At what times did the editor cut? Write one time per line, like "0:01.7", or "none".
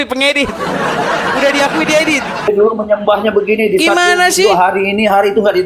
0:02.5